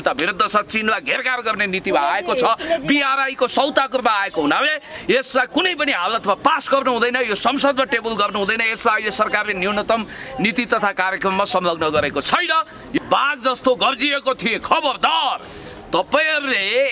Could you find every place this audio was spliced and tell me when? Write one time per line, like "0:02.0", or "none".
0:13.0